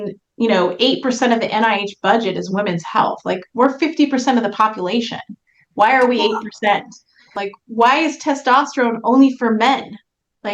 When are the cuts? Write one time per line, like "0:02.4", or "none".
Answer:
0:07.3